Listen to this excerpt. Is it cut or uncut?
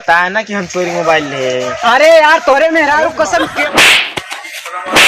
cut